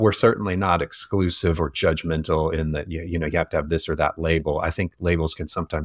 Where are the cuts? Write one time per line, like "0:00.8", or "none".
none